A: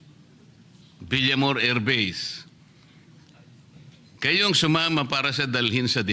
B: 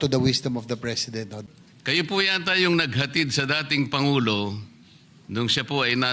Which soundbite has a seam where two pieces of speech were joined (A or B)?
B